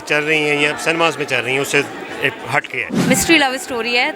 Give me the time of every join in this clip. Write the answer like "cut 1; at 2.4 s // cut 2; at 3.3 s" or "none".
cut 1; at 2.9 s